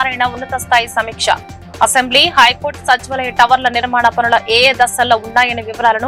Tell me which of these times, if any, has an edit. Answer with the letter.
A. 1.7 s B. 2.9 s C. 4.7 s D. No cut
D